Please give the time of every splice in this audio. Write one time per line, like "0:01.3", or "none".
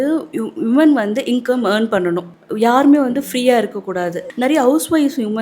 0:02.3
0:04.2